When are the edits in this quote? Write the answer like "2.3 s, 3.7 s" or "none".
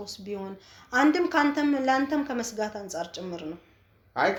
none